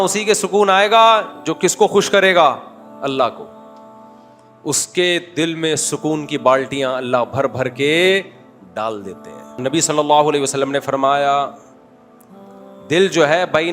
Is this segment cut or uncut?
cut